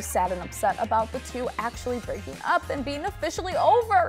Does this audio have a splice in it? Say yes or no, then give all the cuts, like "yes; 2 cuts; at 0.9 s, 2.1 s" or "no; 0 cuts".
no; 0 cuts